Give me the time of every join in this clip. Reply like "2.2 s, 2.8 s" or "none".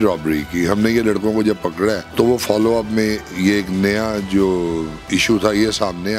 2.0 s